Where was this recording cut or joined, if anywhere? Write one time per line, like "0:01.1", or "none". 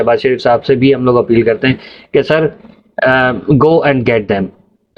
none